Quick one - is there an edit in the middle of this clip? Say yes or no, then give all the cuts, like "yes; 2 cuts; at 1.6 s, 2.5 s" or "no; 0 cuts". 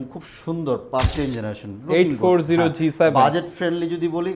yes; 1 cut; at 1.1 s